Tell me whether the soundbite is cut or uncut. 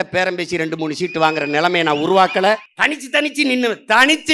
cut